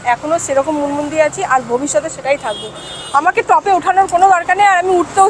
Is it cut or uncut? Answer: uncut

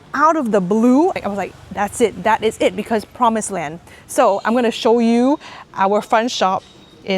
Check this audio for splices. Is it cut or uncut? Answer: cut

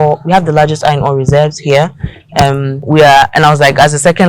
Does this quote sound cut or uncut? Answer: cut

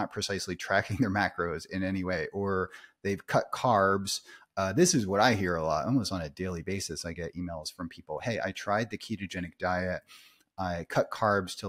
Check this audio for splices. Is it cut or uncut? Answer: uncut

